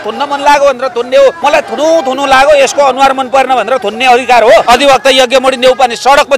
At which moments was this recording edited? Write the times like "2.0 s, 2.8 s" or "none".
1.4 s, 4.6 s